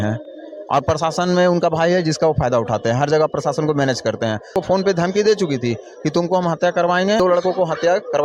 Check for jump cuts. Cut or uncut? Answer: cut